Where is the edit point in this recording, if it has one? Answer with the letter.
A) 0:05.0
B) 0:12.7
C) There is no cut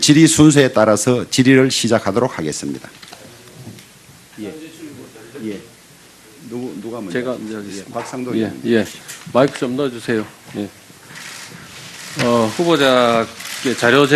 A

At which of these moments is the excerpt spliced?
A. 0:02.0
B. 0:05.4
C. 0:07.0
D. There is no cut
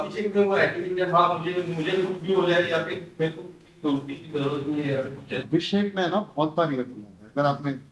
B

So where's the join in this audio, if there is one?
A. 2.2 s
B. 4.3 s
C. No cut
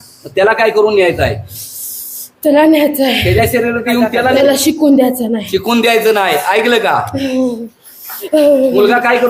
B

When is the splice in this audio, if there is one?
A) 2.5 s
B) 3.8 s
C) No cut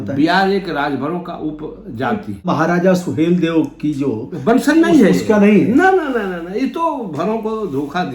A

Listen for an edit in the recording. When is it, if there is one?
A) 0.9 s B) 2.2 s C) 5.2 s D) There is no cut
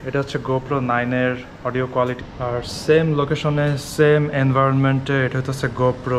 B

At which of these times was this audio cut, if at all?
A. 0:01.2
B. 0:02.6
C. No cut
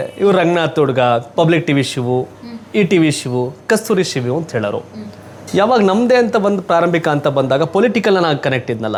C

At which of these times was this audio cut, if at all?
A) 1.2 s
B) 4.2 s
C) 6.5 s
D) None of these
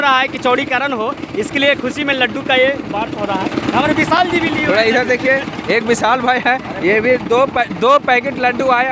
D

